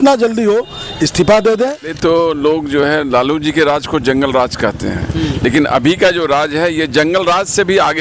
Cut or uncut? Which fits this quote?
cut